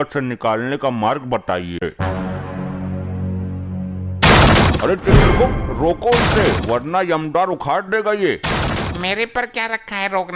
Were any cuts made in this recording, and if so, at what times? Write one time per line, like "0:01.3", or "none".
0:01.9